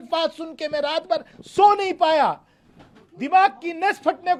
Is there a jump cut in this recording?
no; 0 cuts

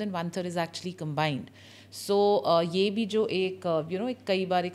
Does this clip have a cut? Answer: no; 0 cuts

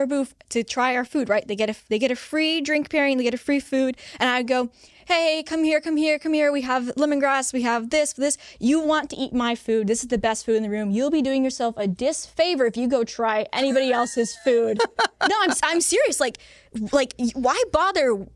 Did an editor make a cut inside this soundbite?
no; 0 cuts

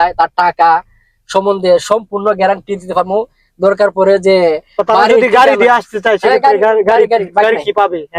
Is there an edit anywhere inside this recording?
no; 0 cuts

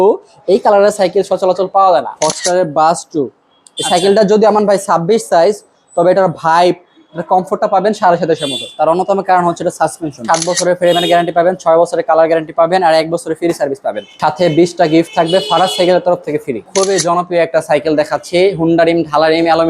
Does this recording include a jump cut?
yes; 4 cuts; at 2.1 s, 10.2 s, 14.1 s, 16.7 s

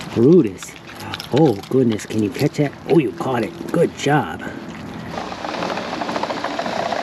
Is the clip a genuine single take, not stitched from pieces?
no; 1 cut; at 5.2 s

